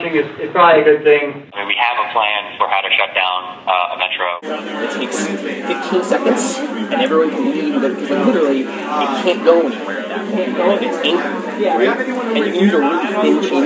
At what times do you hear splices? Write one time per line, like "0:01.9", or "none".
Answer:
0:01.5
0:04.4